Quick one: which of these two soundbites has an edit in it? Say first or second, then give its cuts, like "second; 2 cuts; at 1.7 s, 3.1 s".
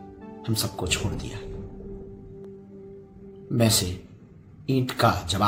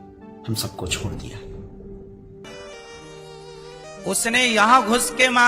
second; 1 cut; at 2.4 s